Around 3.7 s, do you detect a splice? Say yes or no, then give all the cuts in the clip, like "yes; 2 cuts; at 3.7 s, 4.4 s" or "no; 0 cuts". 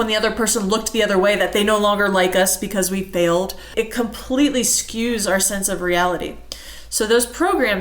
yes; 1 cut; at 3.7 s